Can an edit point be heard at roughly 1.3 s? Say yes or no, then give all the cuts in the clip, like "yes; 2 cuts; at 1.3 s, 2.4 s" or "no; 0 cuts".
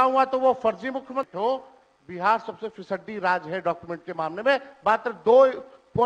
yes; 1 cut; at 1.3 s